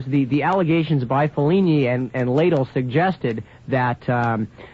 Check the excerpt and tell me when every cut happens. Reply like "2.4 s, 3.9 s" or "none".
2.2 s